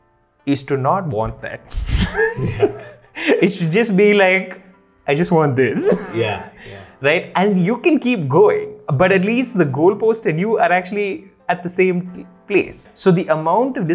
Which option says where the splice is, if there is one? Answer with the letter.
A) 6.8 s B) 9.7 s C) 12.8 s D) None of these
C